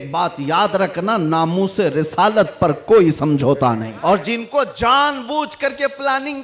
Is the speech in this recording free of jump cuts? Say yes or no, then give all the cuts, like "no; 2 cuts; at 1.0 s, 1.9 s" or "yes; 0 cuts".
no; 1 cut; at 3.9 s